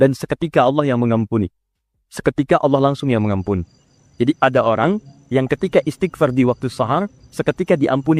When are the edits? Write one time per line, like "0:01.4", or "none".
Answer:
none